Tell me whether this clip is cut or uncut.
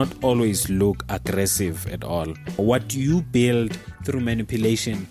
cut